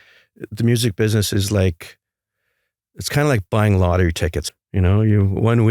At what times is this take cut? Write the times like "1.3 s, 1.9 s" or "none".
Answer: 4.4 s